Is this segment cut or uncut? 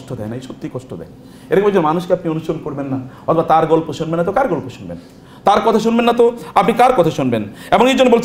uncut